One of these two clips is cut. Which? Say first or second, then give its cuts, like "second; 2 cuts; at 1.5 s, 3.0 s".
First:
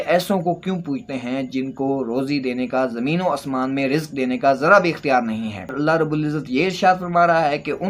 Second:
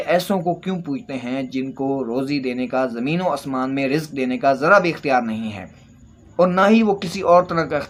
first; 1 cut; at 5.7 s